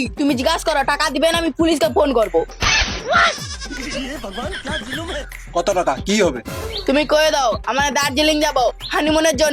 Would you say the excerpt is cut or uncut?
uncut